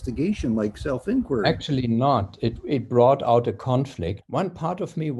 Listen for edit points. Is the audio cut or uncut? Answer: cut